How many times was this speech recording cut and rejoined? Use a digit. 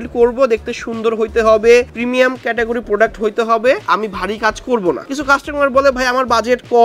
2